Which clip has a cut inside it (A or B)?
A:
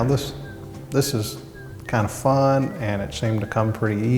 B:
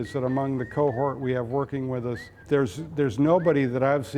B